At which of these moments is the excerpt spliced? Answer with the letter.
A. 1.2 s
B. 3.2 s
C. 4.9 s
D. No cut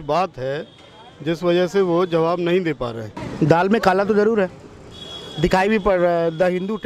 B